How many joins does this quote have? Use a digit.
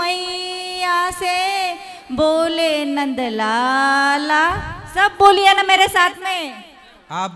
0